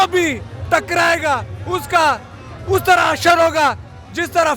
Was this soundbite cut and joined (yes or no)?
no